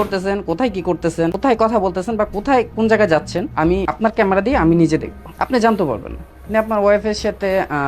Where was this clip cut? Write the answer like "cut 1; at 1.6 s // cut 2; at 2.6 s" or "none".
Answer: cut 1; at 1.4 s // cut 2; at 3.7 s // cut 3; at 5.2 s // cut 4; at 6.4 s